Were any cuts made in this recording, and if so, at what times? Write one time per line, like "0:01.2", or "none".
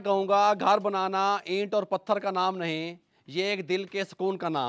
none